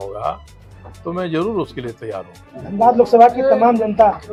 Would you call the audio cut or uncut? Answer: uncut